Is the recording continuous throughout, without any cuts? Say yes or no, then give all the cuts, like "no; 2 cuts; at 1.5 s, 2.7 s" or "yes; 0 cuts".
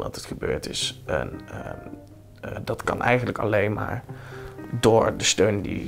yes; 0 cuts